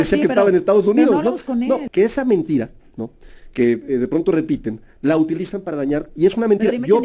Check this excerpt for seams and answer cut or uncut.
cut